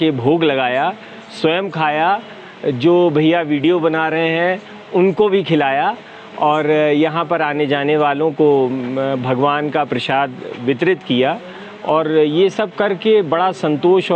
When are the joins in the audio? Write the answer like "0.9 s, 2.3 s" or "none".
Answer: none